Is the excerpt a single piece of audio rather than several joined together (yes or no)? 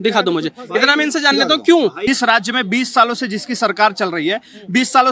no